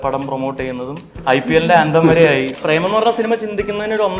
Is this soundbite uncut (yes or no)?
no